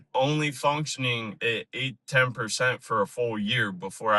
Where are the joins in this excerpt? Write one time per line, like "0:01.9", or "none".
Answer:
none